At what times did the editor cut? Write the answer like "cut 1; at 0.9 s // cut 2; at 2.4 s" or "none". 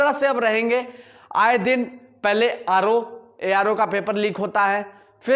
none